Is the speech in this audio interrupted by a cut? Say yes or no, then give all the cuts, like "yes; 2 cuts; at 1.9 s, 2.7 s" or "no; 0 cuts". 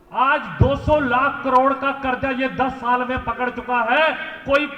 no; 0 cuts